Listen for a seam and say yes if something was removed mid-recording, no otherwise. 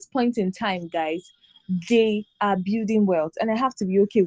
no